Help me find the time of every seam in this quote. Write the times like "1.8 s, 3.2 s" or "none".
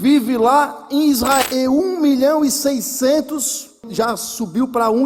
1.4 s